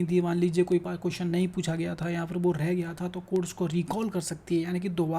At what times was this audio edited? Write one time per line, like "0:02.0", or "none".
none